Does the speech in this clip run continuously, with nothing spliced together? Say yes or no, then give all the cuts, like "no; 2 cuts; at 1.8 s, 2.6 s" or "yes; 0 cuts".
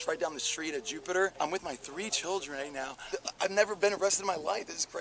no; 2 cuts; at 1.3 s, 3.0 s